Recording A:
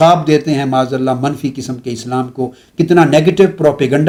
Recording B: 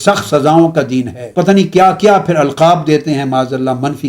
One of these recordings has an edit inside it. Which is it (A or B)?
B